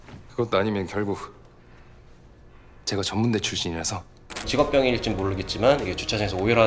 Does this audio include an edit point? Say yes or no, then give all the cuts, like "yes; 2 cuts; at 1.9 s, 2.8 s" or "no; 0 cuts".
yes; 1 cut; at 4.5 s